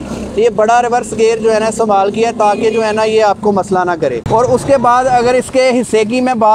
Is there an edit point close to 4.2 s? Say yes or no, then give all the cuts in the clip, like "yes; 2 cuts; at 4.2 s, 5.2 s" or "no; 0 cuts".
yes; 1 cut; at 4.2 s